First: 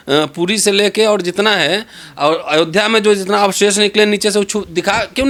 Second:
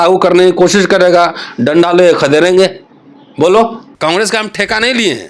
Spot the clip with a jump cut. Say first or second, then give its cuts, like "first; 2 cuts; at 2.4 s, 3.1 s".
second; 1 cut; at 3.8 s